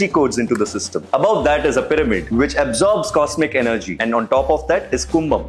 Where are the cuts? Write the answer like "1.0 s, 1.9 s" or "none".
1.8 s